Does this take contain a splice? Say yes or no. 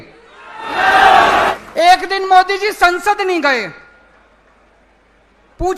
yes